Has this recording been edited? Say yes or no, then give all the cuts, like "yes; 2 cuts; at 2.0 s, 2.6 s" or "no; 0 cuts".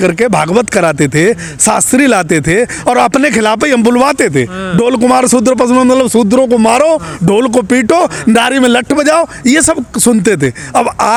no; 0 cuts